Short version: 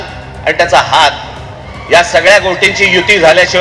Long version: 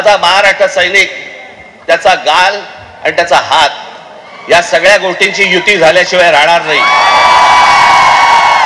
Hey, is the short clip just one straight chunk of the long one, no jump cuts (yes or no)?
yes